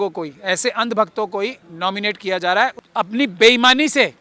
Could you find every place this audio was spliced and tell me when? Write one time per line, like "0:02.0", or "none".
0:02.8